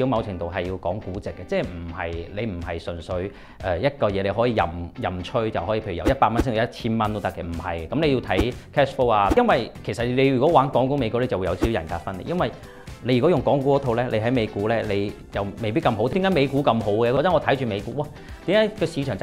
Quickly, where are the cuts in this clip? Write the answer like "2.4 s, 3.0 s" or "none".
9.3 s, 16.1 s, 17.2 s